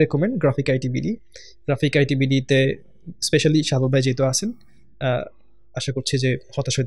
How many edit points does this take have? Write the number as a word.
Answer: zero